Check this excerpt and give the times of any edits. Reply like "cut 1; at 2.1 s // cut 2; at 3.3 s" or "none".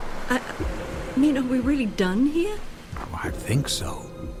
none